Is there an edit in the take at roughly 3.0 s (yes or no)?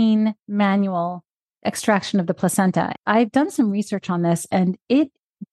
yes